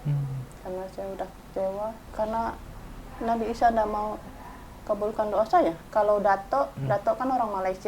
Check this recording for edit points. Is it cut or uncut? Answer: cut